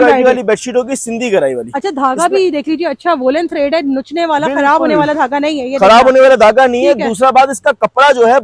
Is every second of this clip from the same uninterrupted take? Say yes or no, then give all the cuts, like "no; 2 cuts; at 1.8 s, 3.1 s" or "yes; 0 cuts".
yes; 0 cuts